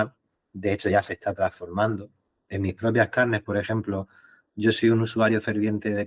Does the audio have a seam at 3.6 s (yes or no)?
no